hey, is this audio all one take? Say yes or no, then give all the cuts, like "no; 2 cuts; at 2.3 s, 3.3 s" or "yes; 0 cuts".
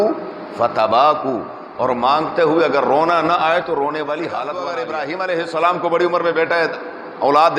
no; 1 cut; at 4.7 s